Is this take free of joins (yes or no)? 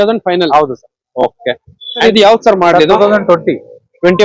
no